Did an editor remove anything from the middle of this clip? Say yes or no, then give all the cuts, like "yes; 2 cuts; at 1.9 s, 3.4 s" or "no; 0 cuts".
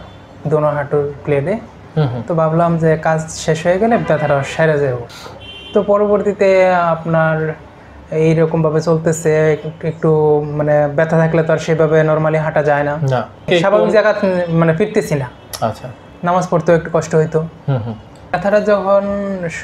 yes; 3 cuts; at 5.1 s, 13.5 s, 18.4 s